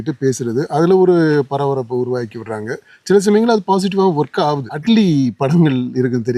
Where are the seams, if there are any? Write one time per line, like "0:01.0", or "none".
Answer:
0:04.7